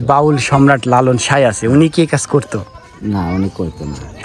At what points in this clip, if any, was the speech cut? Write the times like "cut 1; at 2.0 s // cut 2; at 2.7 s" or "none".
none